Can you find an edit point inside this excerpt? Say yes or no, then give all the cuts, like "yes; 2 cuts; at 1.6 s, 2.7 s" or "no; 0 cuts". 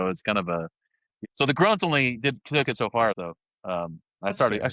yes; 2 cuts; at 1.1 s, 3.2 s